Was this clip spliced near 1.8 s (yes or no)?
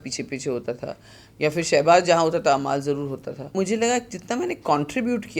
no